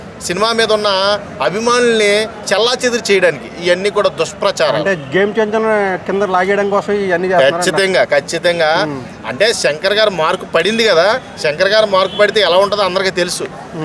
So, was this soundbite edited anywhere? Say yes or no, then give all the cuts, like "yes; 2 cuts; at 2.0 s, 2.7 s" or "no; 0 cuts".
no; 0 cuts